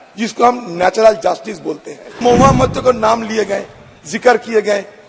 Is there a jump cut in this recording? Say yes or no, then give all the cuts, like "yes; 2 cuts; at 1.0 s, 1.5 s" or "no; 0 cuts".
yes; 1 cut; at 2.2 s